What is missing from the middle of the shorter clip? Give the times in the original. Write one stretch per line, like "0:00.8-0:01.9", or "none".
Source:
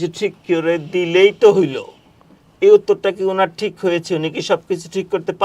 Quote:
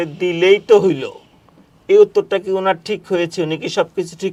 none